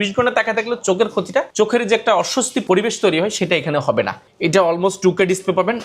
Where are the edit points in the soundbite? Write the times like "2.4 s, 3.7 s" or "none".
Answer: 1.5 s, 2.6 s, 4.2 s